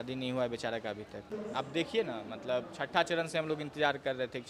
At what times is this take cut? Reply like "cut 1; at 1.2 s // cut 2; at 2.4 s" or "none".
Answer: none